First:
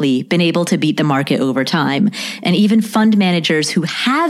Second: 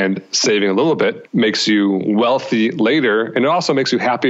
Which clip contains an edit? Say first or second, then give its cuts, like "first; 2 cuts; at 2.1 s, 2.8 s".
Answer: second; 1 cut; at 1.2 s